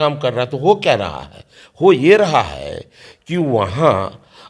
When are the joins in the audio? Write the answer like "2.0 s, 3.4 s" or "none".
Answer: none